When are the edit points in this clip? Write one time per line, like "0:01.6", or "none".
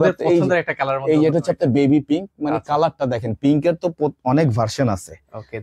none